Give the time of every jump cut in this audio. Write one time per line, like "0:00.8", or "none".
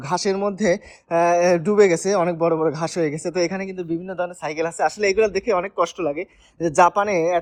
none

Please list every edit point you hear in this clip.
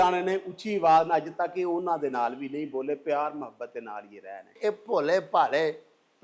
0:04.6

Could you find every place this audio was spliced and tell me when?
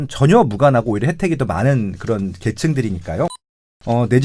none

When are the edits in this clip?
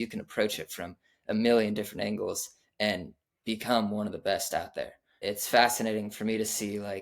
0:05.2

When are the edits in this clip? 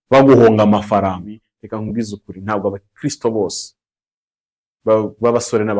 0:01.5

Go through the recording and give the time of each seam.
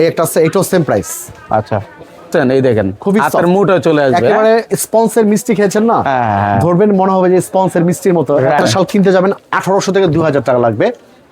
0:02.3
0:08.6

